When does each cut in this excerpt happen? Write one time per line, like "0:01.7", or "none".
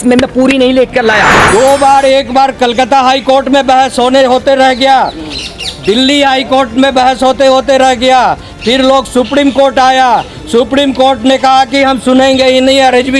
0:01.4